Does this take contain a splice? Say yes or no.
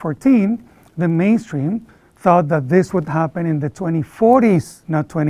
no